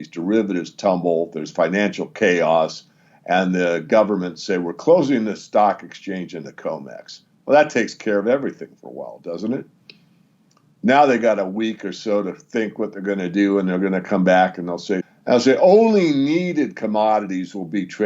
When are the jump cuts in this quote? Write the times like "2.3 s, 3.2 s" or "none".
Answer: 15.1 s